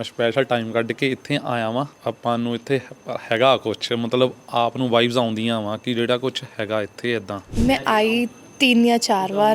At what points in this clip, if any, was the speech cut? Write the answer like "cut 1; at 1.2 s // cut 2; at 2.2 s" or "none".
cut 1; at 1.9 s // cut 2; at 7.5 s